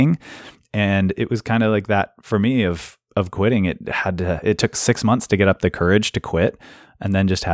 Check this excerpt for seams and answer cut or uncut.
uncut